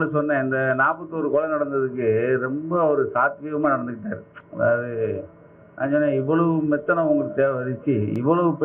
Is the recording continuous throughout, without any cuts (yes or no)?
yes